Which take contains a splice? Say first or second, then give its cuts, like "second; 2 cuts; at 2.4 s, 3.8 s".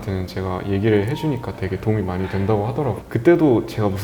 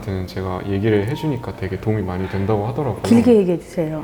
first; 1 cut; at 3.0 s